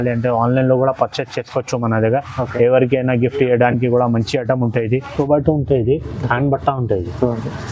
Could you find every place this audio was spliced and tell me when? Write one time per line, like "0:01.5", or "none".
0:05.1